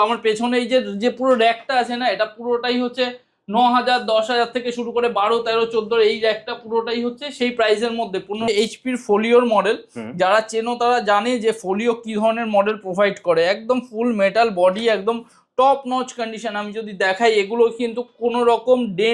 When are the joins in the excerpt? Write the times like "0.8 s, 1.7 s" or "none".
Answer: 8.5 s